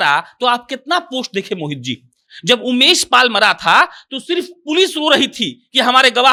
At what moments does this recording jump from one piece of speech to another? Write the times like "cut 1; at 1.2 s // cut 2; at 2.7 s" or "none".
none